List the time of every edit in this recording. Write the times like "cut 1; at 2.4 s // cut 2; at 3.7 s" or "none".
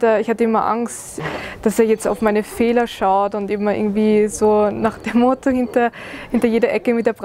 cut 1; at 1.2 s